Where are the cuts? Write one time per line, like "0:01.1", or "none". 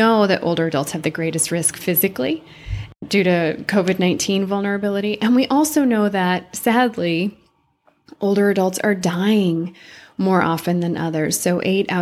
0:03.0